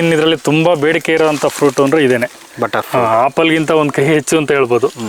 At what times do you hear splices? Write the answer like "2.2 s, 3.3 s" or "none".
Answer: none